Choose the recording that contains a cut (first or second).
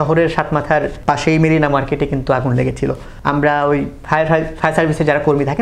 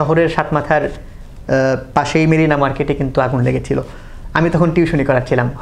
first